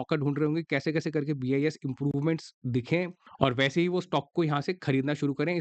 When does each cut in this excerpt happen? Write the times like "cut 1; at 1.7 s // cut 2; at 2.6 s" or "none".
none